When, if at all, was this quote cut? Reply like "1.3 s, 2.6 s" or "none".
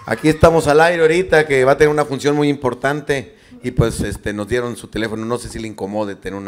none